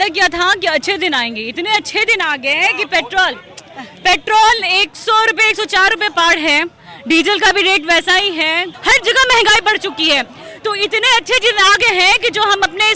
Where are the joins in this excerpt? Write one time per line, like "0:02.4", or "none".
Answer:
0:08.7

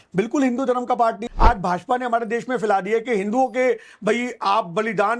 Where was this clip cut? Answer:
0:01.2

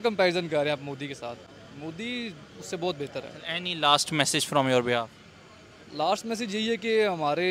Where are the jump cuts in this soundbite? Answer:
none

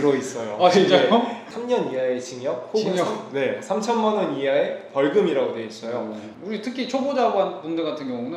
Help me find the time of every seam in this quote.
0:01.5
0:06.2

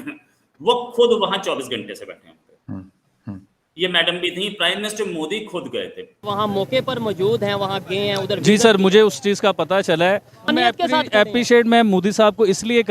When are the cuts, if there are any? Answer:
0:06.2
0:10.5

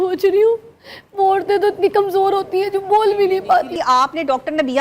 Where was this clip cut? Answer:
0:03.8

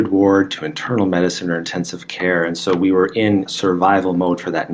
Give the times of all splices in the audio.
0:03.5

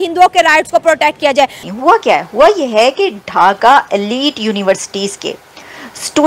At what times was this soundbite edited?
0:01.6

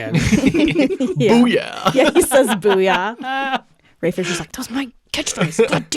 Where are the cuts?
0:04.5

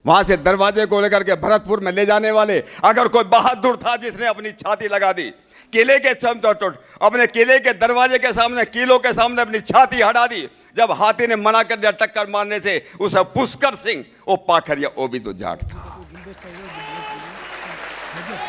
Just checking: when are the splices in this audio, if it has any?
none

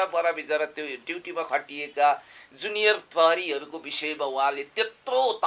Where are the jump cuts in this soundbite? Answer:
none

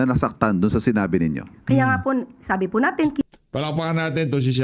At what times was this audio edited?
none

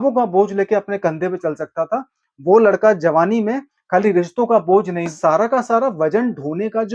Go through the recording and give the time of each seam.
0:05.1

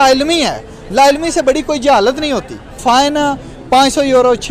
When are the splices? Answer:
0:02.8

